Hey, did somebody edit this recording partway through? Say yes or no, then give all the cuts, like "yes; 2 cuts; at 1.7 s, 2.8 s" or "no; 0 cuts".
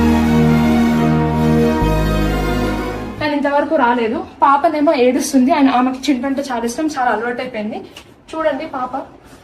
yes; 1 cut; at 3.1 s